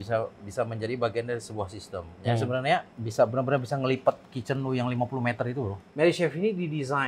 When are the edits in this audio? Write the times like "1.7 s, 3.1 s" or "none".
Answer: 3.0 s, 5.8 s